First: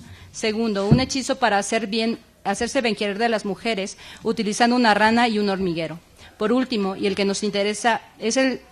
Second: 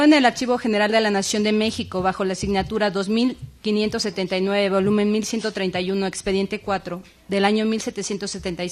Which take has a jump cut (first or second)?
second